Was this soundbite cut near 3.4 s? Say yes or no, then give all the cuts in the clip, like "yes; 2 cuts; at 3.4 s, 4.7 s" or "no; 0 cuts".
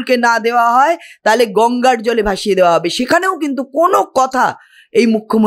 no; 0 cuts